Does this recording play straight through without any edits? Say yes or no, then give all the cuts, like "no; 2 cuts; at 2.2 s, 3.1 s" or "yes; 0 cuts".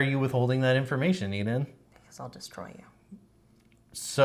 yes; 0 cuts